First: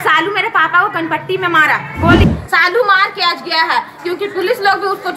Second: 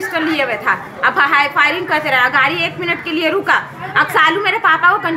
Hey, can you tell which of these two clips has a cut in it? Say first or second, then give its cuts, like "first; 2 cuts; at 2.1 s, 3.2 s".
first; 1 cut; at 2.3 s